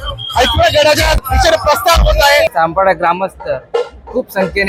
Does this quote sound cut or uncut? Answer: cut